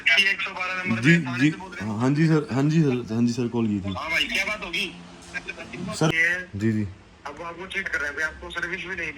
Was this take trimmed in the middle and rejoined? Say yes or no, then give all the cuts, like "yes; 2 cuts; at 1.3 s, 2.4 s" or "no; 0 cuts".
yes; 1 cut; at 6.1 s